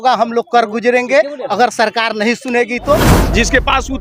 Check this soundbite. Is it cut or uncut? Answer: cut